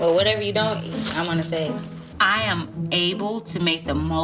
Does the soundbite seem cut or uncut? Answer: cut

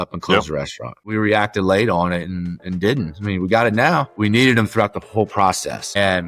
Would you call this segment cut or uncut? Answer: cut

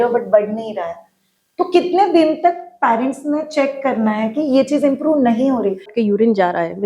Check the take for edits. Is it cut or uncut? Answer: cut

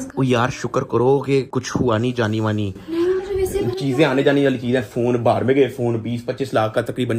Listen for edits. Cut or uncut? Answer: uncut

